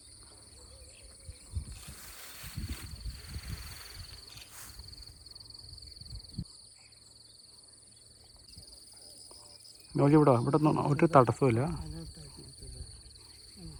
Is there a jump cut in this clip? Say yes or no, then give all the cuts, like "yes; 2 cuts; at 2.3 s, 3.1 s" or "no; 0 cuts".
no; 0 cuts